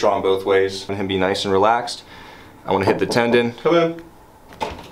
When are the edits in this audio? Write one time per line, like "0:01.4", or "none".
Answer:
0:00.9